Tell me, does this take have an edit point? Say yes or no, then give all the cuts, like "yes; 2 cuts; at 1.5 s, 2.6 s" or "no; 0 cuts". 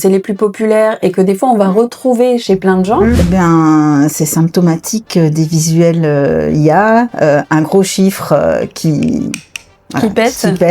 yes; 1 cut; at 3.2 s